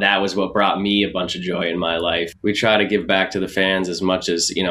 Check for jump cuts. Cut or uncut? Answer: cut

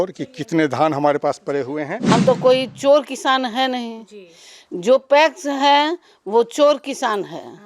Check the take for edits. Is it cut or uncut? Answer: cut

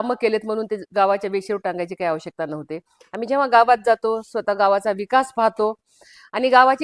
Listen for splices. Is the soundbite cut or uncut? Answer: uncut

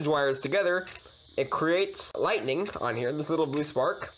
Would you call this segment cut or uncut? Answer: cut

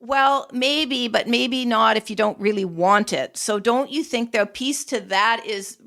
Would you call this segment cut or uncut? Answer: uncut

